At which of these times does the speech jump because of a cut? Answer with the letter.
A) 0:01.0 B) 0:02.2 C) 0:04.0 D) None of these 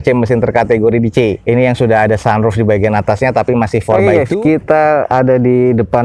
C